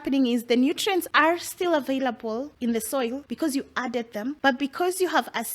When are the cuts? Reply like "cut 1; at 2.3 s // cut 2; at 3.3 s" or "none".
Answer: cut 1; at 1.1 s // cut 2; at 2.5 s // cut 3; at 3.3 s // cut 4; at 4.4 s